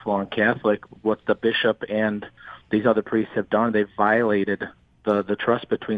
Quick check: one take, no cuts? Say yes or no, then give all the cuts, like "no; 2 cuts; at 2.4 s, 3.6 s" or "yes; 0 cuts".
yes; 0 cuts